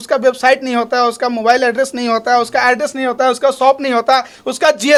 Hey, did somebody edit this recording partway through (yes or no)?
no